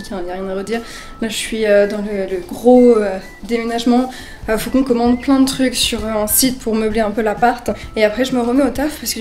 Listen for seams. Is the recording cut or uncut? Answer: uncut